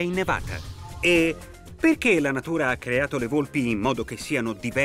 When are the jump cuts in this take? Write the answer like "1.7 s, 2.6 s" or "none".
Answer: 2.8 s